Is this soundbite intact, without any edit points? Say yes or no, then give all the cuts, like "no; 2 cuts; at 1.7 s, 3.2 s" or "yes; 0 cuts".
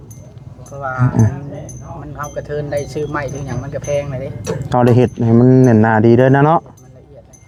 yes; 0 cuts